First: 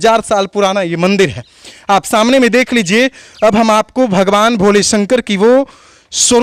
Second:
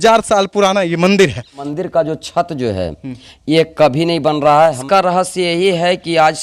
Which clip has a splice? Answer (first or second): second